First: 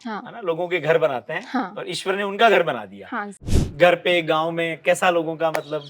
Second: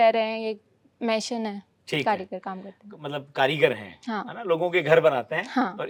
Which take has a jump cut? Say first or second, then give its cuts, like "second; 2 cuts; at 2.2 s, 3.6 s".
first; 1 cut; at 3.6 s